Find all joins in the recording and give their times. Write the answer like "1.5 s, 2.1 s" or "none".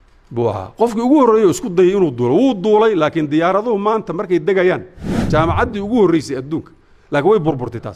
5.2 s